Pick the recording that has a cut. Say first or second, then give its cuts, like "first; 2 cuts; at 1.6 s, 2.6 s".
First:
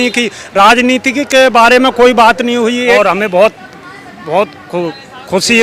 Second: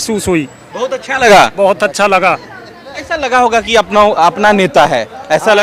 first; 1 cut; at 3.0 s